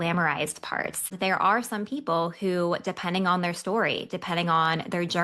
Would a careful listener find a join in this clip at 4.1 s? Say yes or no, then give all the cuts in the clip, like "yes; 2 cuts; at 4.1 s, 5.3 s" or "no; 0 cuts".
no; 1 cut; at 1.1 s